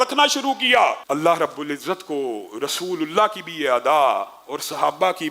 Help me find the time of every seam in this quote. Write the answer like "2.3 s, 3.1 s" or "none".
1.0 s